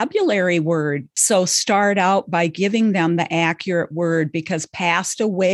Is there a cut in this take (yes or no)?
yes